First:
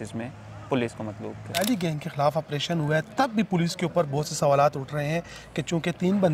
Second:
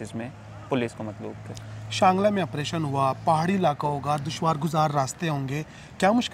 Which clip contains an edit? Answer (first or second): first